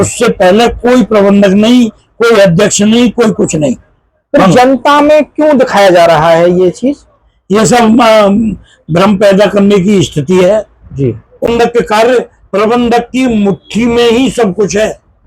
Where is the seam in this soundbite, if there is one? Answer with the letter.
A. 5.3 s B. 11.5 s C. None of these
B